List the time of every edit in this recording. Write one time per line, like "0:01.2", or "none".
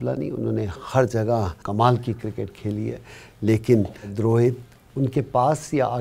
0:01.6
0:04.1